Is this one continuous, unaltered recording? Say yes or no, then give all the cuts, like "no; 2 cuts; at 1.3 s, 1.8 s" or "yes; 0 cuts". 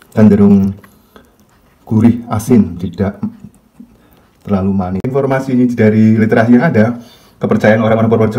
no; 1 cut; at 5.1 s